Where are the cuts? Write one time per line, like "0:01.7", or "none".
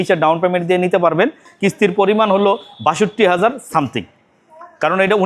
0:01.5